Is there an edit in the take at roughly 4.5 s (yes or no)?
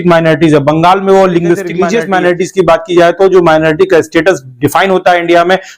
no